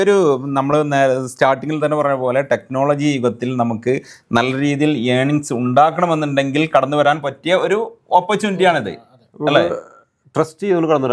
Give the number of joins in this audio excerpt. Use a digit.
0